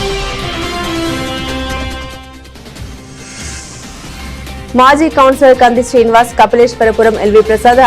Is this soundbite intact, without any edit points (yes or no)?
no